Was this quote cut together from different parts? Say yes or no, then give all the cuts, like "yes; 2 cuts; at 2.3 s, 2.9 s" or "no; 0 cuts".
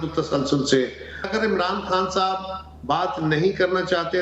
yes; 1 cut; at 1.3 s